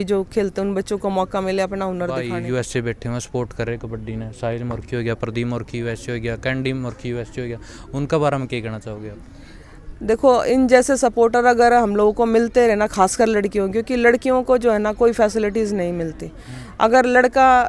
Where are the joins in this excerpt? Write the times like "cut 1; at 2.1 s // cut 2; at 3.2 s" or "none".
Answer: cut 1; at 2.3 s